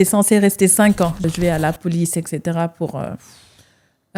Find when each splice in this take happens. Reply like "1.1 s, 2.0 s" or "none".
1.2 s